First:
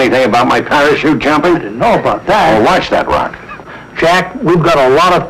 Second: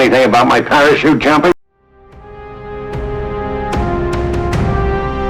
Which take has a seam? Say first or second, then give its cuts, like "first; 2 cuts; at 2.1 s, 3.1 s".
first; 1 cut; at 1.5 s